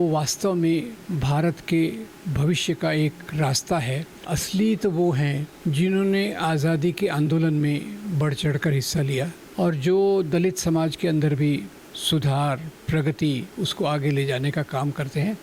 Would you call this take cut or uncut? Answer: cut